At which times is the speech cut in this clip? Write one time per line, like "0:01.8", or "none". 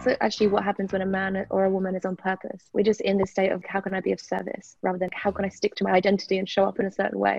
0:02.5
0:03.6
0:05.1